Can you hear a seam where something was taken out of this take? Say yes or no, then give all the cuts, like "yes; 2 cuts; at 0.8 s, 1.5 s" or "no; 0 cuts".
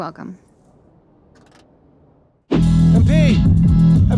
yes; 1 cut; at 2.6 s